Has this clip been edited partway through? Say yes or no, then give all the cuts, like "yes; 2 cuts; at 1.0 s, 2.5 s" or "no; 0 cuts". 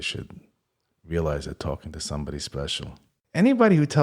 yes; 1 cut; at 3.1 s